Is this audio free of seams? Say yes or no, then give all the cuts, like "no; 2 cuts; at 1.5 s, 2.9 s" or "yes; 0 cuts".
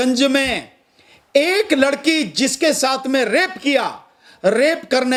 yes; 0 cuts